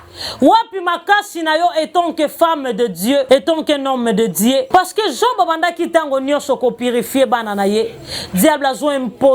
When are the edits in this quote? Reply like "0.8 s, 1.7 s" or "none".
3.2 s, 4.7 s